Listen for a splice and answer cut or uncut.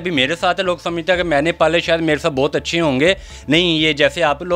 uncut